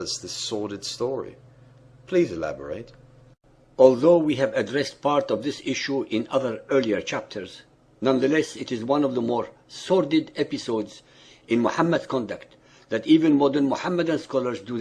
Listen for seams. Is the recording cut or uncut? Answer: uncut